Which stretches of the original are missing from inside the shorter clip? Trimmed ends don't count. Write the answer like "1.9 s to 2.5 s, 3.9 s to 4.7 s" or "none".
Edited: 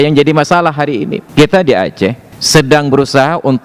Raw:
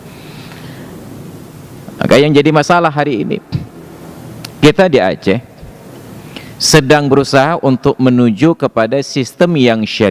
3.4 s to 4.5 s, 5.6 s to 6.5 s